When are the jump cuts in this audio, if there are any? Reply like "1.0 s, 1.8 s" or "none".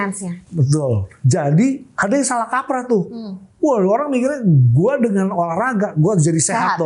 1.1 s, 1.9 s